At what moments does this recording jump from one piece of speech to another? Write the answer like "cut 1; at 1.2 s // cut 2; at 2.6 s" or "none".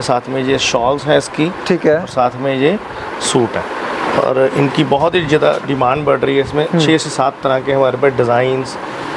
none